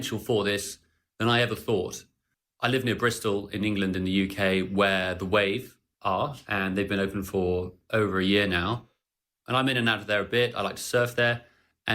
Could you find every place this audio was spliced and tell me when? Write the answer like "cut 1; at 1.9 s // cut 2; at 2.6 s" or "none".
none

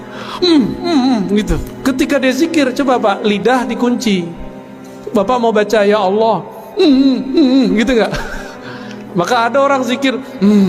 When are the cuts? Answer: cut 1; at 1.7 s

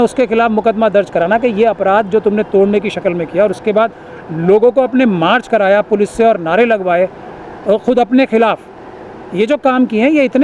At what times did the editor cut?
none

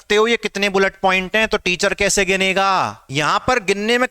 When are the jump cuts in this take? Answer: cut 1; at 3.0 s

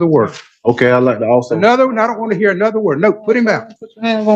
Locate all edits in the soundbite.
none

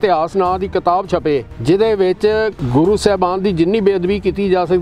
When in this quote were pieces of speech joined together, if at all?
cut 1; at 1.5 s // cut 2; at 2.6 s

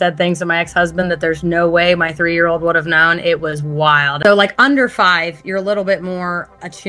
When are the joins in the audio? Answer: cut 1; at 4.2 s

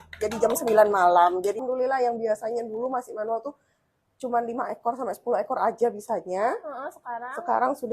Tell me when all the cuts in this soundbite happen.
cut 1; at 1.6 s

